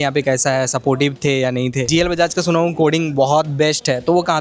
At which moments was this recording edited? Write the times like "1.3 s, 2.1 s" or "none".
1.9 s